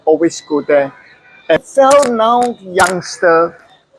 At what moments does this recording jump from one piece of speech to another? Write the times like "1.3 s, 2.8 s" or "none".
1.6 s